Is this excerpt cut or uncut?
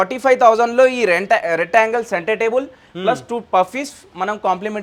uncut